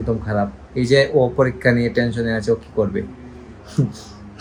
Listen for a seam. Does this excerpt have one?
no; 0 cuts

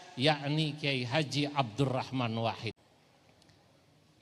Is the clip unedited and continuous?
no; 1 cut; at 2.7 s

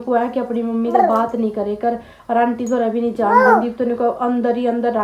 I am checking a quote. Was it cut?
no; 0 cuts

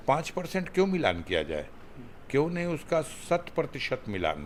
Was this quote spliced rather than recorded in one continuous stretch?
no; 0 cuts

